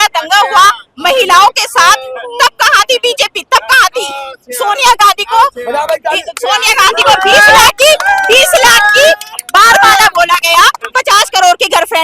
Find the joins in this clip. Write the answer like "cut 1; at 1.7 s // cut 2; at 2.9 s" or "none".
cut 1; at 10.8 s